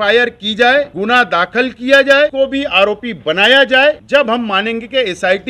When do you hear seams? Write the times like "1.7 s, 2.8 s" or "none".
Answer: 0.9 s, 2.3 s, 4.0 s